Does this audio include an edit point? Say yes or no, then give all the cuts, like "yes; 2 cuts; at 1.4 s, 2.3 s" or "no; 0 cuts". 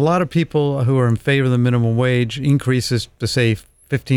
no; 0 cuts